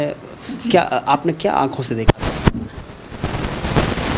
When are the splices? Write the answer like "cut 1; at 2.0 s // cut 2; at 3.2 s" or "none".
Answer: none

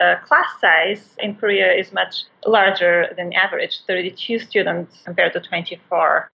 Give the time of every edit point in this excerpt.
cut 1; at 1.2 s // cut 2; at 5.0 s

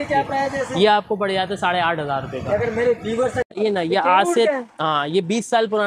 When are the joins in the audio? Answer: cut 1; at 3.6 s

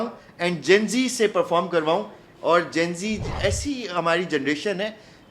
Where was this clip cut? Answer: cut 1; at 3.3 s

